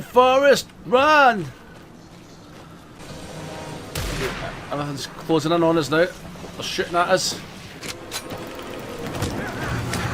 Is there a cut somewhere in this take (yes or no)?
yes